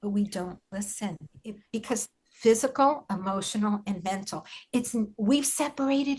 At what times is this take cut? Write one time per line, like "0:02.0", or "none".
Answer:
0:01.6